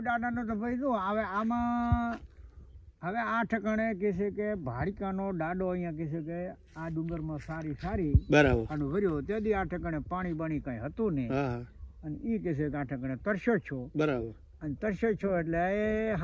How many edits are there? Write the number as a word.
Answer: zero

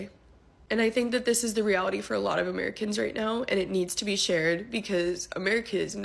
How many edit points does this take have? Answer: zero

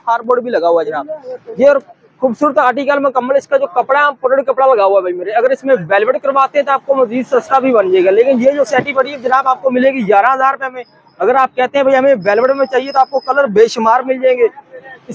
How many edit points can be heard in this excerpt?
zero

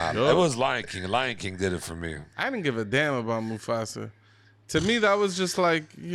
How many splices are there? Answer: one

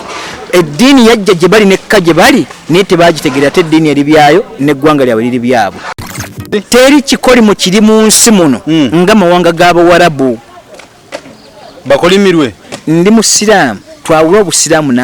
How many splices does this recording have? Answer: one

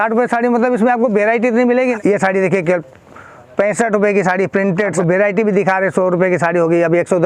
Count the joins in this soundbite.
two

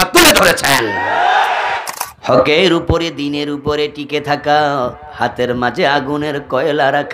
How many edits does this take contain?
one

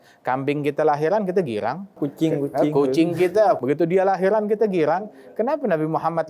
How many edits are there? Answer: one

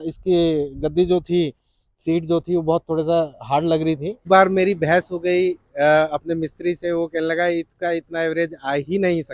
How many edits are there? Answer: one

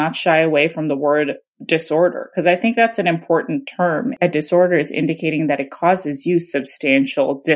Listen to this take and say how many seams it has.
one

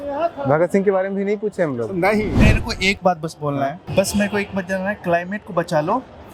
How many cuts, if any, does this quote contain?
two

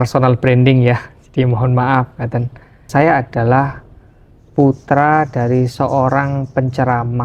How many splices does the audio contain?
one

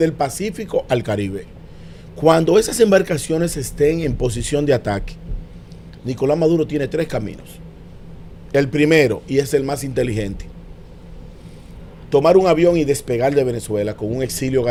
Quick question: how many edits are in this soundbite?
zero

